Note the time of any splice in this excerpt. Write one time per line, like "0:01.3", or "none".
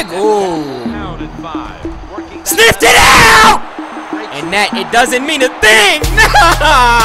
0:00.9